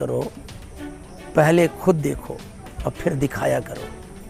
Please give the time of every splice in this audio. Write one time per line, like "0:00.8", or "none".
none